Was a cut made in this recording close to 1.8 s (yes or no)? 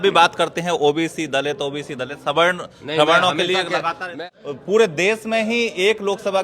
no